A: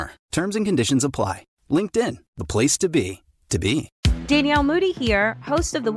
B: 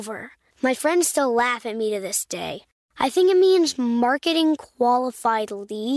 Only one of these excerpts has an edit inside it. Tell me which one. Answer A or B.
A